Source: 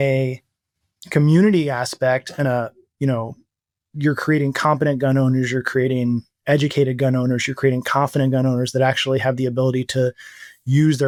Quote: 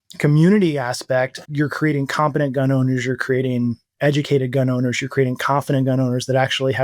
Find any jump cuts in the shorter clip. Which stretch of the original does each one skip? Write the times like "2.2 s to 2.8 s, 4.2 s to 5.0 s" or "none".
2.3 s to 3.8 s